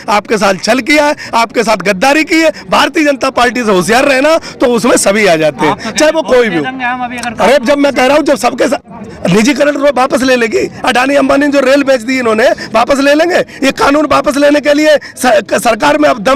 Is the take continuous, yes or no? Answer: yes